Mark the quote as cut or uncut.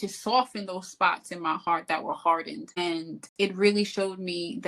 cut